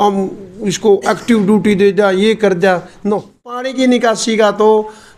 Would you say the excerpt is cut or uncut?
cut